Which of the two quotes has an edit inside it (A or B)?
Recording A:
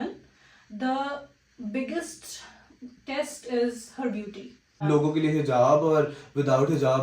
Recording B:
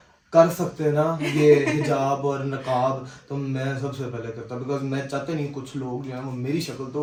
A